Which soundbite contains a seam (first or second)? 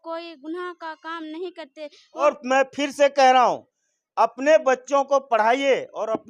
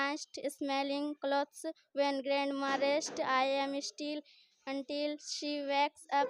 first